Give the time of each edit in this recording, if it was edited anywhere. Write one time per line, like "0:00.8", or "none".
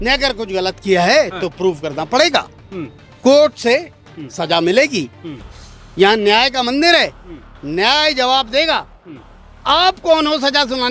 none